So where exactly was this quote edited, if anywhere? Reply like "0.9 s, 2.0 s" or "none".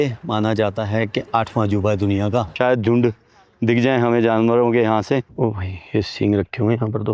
2.5 s, 5.2 s